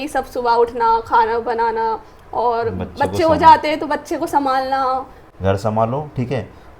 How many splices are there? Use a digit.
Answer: 1